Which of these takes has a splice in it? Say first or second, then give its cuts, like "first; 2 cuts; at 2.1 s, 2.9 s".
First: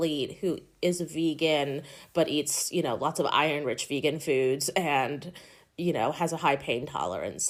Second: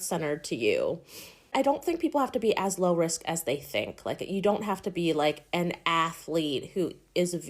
second; 1 cut; at 1.5 s